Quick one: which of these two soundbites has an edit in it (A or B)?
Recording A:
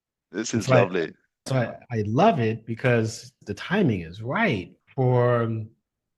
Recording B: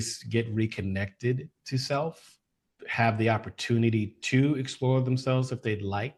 A